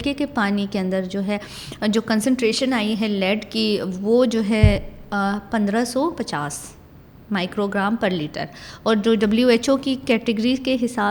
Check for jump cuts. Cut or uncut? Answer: uncut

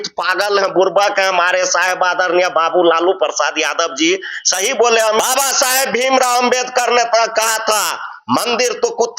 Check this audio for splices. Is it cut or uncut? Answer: cut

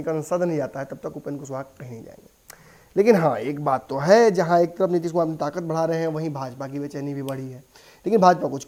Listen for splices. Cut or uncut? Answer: uncut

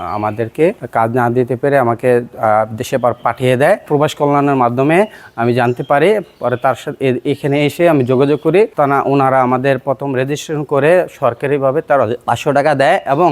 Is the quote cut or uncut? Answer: cut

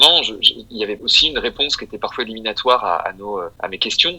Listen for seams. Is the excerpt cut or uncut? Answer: cut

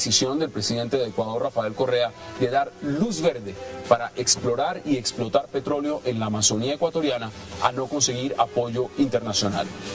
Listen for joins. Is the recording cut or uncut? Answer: cut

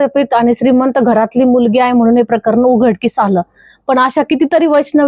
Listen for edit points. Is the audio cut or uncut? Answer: uncut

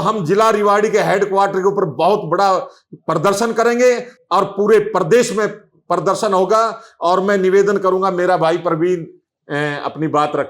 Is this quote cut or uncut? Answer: uncut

